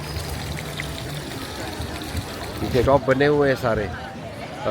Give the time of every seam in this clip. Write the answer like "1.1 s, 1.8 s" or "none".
2.8 s